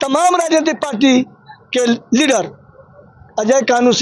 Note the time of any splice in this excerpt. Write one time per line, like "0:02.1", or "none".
none